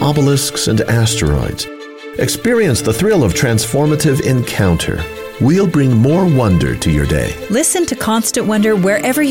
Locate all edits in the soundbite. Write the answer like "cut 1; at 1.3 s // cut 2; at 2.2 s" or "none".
none